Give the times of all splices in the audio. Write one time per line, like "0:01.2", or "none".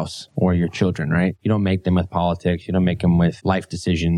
0:01.4
0:03.4